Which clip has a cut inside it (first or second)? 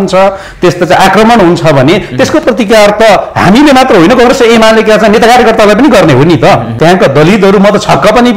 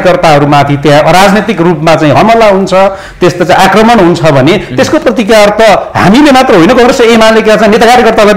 first